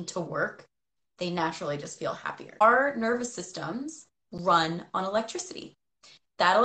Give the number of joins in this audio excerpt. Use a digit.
1